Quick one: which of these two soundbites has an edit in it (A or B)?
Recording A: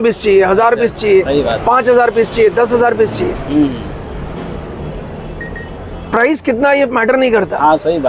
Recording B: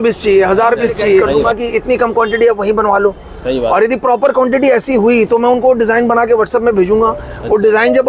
B